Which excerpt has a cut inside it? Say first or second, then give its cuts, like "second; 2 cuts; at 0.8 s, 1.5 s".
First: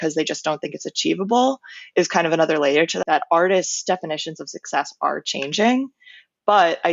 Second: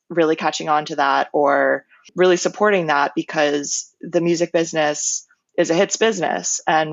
first; 1 cut; at 2.9 s